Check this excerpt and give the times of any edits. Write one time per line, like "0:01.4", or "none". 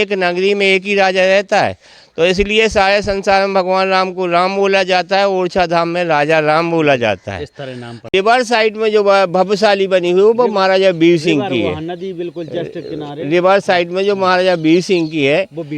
0:08.1